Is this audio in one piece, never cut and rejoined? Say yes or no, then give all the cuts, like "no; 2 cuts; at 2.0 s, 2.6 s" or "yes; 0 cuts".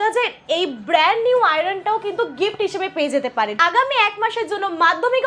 no; 1 cut; at 3.5 s